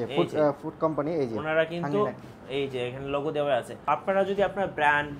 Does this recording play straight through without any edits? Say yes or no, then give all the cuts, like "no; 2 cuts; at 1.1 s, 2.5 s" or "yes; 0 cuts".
no; 1 cut; at 3.9 s